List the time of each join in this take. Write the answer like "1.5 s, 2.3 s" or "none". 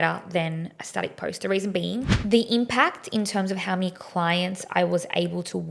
2.1 s